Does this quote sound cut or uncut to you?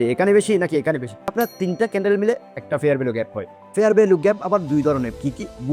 cut